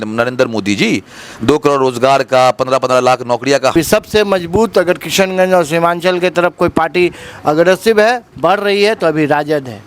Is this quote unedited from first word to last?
no; 1 cut; at 3.7 s

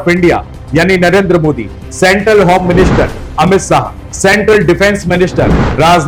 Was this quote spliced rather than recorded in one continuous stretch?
no; 0 cuts

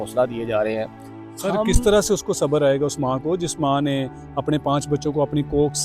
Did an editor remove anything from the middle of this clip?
no; 0 cuts

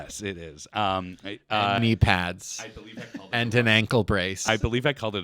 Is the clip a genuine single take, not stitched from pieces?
yes; 0 cuts

